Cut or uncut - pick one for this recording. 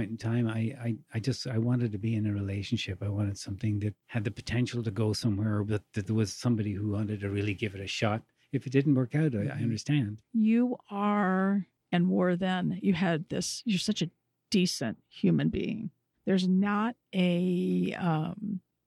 cut